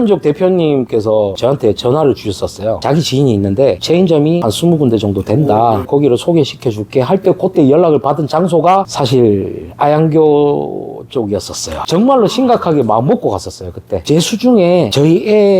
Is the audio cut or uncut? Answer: cut